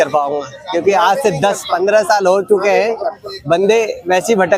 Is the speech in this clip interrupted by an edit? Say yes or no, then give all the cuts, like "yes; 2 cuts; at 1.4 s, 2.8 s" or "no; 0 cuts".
no; 0 cuts